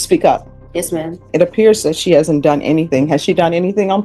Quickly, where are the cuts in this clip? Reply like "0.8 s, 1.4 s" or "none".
1.3 s